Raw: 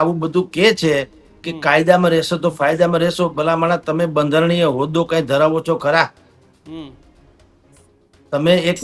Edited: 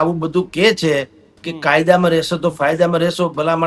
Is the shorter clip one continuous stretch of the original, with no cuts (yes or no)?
yes